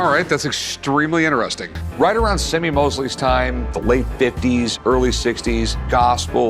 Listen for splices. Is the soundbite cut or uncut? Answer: uncut